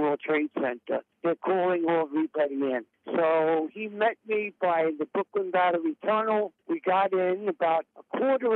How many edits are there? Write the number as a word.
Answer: zero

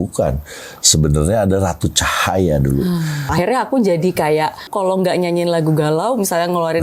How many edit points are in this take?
two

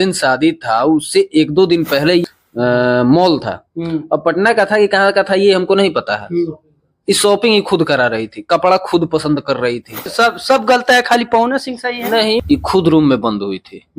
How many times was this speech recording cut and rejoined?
three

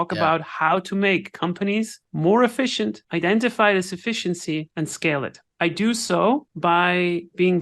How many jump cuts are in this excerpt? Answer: four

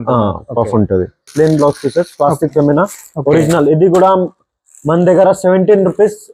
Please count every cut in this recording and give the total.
one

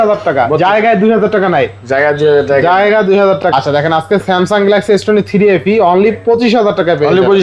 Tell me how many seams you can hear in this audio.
one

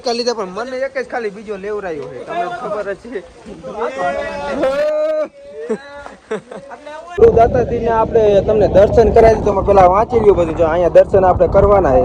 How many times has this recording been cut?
one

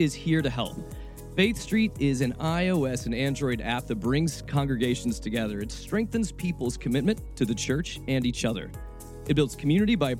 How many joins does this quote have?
zero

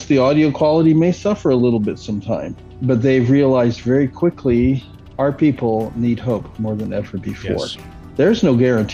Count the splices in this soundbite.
zero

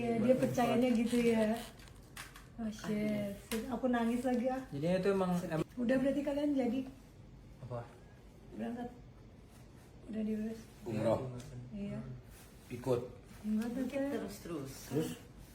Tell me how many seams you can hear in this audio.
one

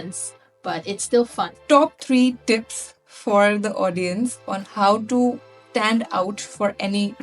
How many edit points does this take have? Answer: two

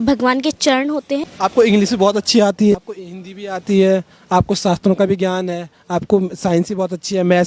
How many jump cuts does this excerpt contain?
two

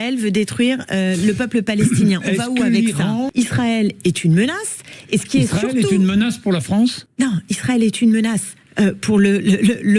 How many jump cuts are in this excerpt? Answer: two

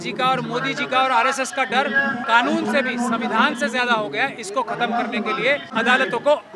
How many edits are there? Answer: two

